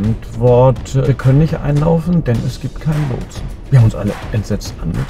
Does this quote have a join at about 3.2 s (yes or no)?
no